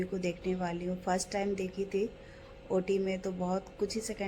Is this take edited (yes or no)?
no